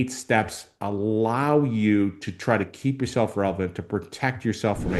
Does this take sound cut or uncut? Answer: uncut